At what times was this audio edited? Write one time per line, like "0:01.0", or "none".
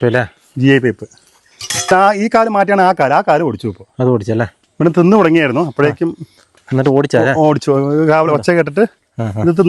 0:01.9
0:04.6